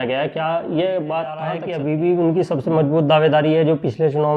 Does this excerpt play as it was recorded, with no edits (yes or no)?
no